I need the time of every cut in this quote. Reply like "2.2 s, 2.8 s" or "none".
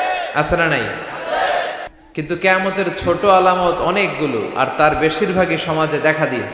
1.8 s